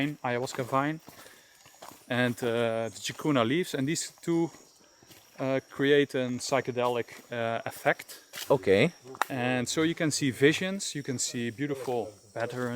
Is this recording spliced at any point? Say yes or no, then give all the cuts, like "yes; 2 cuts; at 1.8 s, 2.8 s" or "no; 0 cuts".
no; 0 cuts